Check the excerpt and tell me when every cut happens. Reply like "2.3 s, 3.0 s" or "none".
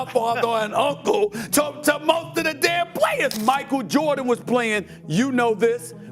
3.3 s